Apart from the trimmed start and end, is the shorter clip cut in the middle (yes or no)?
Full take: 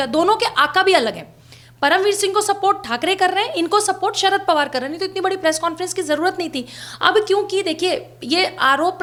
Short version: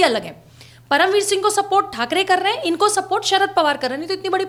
no